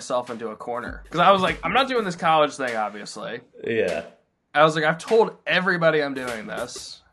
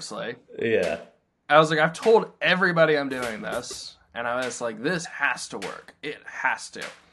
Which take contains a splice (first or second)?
first